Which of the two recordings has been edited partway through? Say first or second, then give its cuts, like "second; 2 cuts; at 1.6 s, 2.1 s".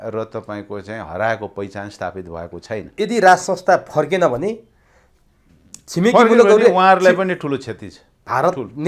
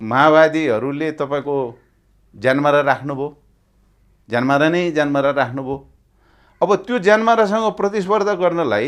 first; 1 cut; at 2.9 s